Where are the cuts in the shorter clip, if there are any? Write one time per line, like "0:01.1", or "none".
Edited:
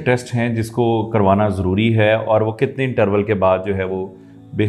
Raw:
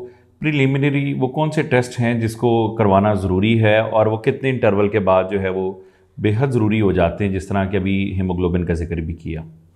none